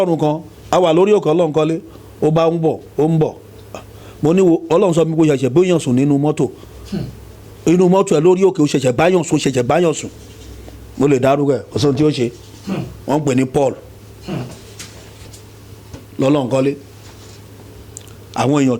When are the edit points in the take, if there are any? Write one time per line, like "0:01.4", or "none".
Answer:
none